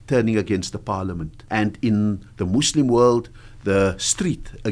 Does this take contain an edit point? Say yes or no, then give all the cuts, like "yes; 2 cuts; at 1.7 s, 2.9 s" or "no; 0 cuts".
yes; 1 cut; at 1.3 s